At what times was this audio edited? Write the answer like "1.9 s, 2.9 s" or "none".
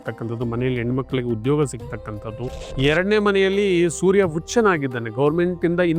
2.6 s

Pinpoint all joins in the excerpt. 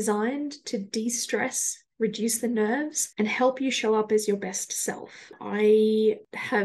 5.4 s

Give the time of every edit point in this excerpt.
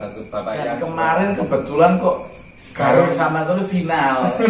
0.9 s

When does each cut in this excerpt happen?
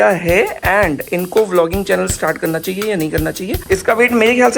3.5 s

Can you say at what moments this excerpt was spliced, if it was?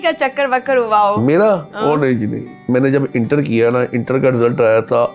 2.5 s

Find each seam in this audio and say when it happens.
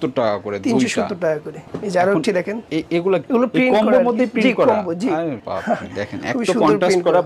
none

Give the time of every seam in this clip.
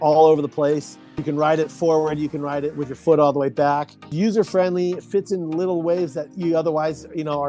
1.2 s, 4.1 s

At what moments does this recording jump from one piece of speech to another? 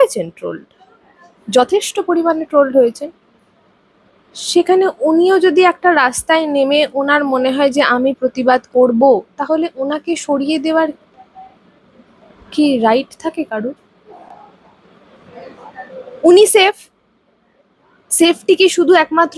none

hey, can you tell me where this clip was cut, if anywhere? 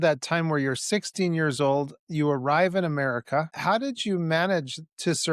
3.5 s

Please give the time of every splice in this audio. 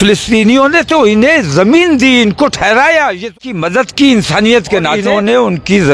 3.3 s, 5.0 s

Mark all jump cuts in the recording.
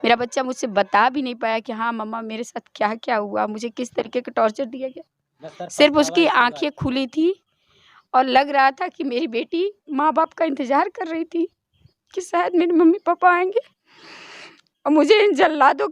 none

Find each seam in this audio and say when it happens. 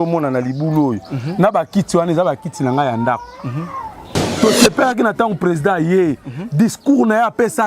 4.2 s

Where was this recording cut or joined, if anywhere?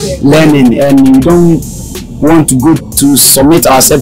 2.9 s

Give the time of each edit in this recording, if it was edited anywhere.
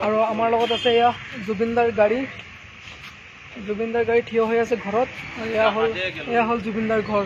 none

